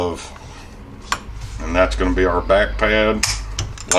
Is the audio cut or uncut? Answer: cut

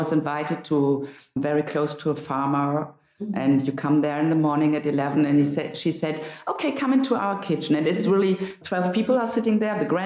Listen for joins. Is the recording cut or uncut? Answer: uncut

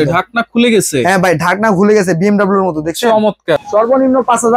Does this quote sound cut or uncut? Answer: cut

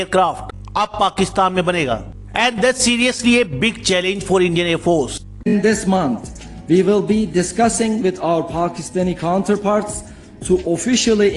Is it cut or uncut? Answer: cut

